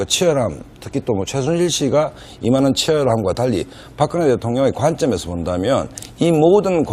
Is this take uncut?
no; 1 cut; at 1.9 s

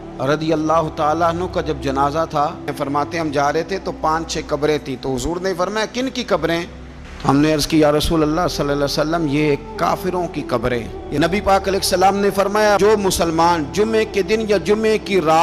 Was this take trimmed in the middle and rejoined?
yes; 2 cuts; at 2.7 s, 11.0 s

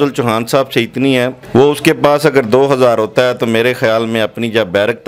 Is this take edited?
yes; 1 cut; at 1.4 s

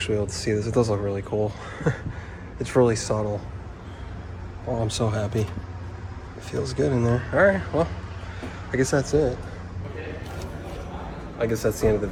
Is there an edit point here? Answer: no; 0 cuts

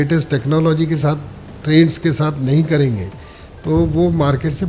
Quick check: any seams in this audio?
no; 0 cuts

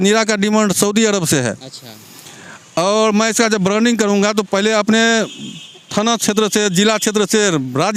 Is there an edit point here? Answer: no; 0 cuts

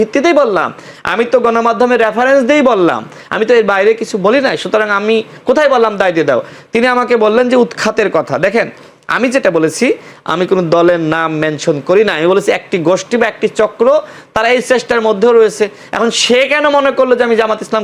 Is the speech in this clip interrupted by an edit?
no; 0 cuts

